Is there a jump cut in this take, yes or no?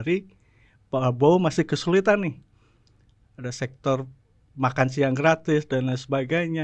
no